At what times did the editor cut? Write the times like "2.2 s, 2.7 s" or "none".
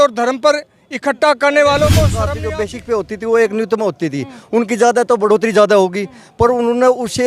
2.2 s